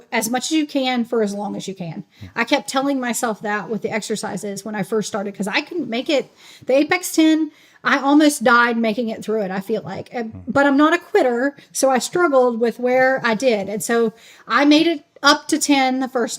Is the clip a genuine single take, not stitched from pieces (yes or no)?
yes